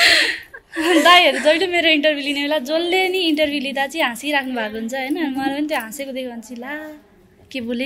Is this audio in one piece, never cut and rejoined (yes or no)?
yes